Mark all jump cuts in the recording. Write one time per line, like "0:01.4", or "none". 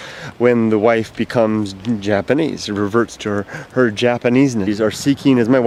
none